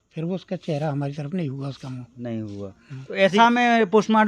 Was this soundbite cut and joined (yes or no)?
yes